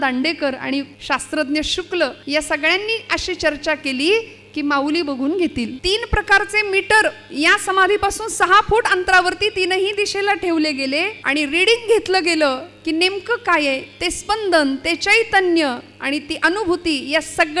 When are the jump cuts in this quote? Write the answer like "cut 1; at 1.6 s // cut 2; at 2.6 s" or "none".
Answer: cut 1; at 1.0 s // cut 2; at 2.2 s // cut 3; at 5.8 s // cut 4; at 11.2 s